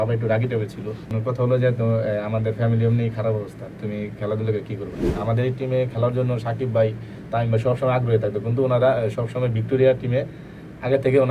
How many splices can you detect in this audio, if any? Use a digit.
2